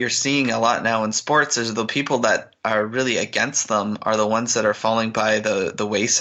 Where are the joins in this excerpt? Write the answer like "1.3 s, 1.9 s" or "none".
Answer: none